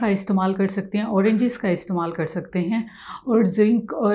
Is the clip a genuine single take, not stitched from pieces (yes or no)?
yes